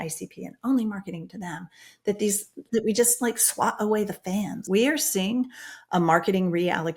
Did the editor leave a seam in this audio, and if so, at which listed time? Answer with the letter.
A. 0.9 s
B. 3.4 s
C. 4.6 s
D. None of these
C